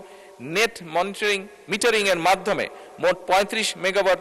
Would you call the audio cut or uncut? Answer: uncut